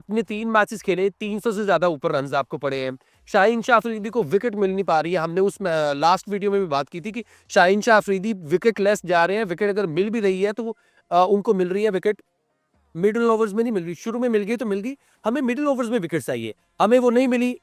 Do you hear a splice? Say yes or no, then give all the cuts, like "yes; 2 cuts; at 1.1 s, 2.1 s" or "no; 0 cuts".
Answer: no; 0 cuts